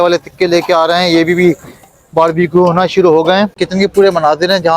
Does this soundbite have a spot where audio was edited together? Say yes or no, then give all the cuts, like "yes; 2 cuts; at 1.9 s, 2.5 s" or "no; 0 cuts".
yes; 1 cut; at 3.5 s